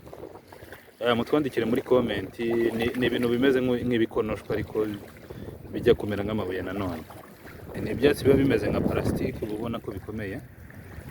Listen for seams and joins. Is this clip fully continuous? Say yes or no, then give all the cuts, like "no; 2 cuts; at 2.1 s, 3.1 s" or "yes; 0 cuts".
no; 1 cut; at 7.8 s